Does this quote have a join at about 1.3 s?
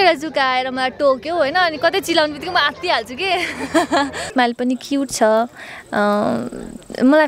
no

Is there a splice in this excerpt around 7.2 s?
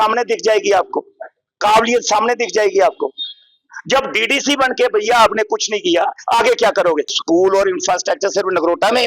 yes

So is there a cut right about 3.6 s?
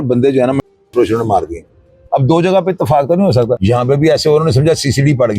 yes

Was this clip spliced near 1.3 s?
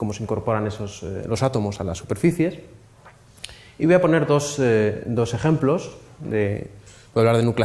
yes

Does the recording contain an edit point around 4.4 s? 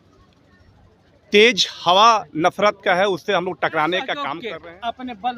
yes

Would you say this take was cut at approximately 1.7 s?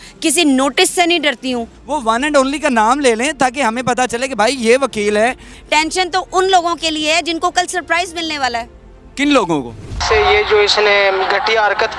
yes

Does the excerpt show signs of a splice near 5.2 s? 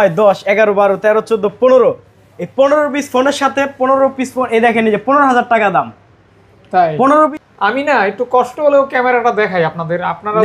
no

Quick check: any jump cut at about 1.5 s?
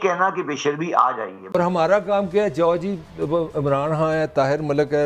yes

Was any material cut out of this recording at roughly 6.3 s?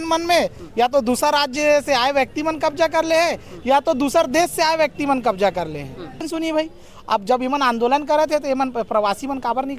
yes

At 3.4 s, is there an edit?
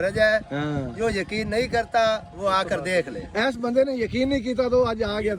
yes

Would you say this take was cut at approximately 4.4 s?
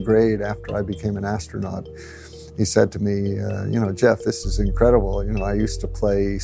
no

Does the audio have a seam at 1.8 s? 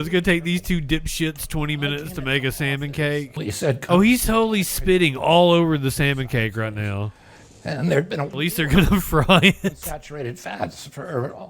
no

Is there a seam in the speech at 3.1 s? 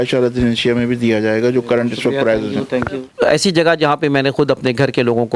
yes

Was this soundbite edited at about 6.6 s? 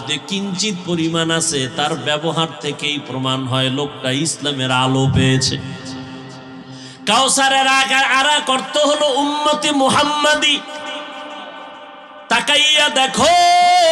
yes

